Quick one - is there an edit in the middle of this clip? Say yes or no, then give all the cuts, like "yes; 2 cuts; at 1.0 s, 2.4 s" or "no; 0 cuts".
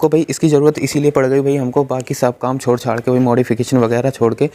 no; 0 cuts